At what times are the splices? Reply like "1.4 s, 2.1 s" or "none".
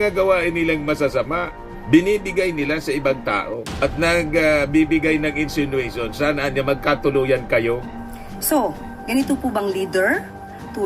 7.9 s